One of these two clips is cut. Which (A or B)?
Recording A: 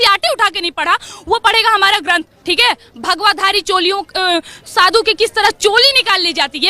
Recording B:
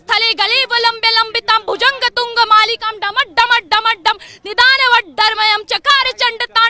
A